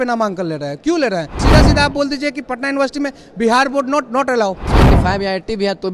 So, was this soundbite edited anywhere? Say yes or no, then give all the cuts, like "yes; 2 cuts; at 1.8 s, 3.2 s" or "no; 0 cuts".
yes; 2 cuts; at 1.4 s, 4.7 s